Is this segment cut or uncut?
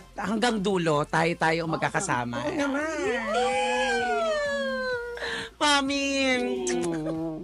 uncut